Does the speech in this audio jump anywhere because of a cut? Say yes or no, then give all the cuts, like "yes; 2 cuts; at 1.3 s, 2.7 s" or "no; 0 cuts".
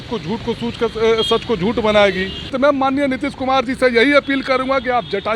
yes; 1 cut; at 2.5 s